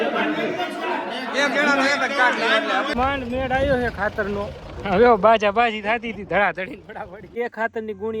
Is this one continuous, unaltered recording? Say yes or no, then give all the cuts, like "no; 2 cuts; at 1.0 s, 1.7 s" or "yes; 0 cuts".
no; 2 cuts; at 2.9 s, 7.4 s